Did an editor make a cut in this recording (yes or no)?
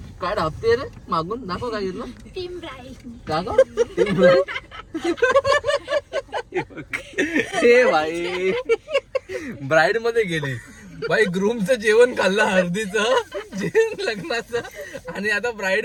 no